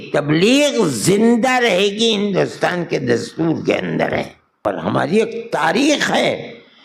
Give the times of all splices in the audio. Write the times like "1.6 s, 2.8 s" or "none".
4.6 s